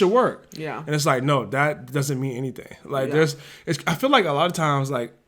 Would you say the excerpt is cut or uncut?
uncut